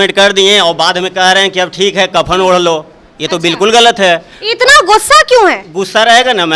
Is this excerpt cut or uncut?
uncut